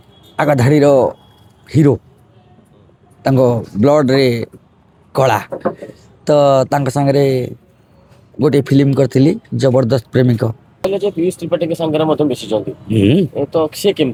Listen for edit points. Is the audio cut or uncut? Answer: uncut